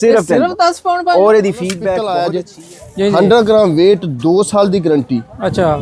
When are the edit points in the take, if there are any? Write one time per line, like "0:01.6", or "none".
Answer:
0:02.0

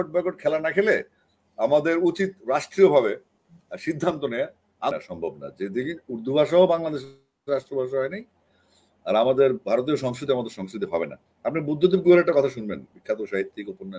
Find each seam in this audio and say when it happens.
0:04.9

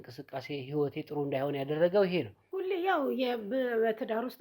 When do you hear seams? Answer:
0:02.4

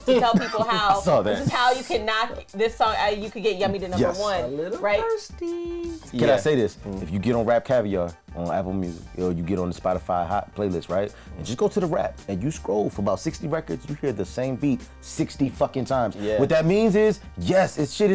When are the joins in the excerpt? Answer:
0:06.1

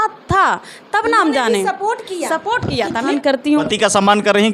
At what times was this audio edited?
0:03.1

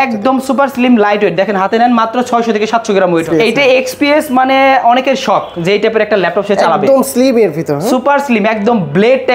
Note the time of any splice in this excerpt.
0:03.2

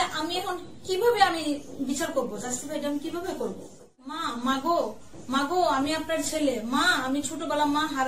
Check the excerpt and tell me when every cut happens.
0:04.3

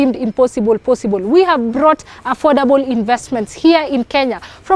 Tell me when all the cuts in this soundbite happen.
0:02.7

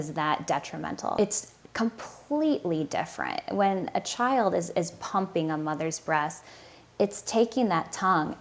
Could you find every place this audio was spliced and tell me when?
0:01.1

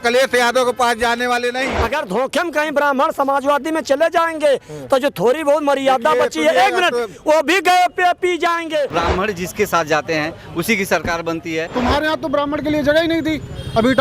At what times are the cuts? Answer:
0:01.7
0:08.9
0:11.6

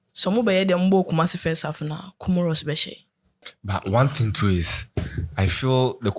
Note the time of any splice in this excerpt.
0:03.5

